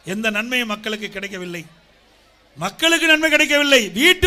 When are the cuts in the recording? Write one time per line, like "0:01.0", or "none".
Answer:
none